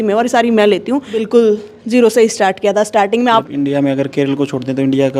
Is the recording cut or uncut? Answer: cut